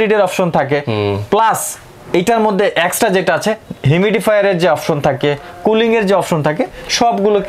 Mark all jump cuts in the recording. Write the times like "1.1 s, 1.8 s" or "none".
none